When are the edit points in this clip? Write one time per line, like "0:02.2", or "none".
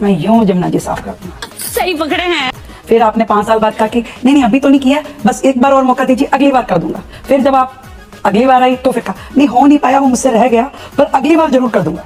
none

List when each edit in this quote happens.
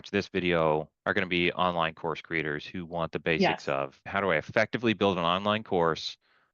0:00.9
0:04.1

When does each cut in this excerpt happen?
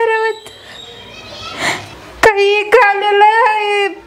0:01.9

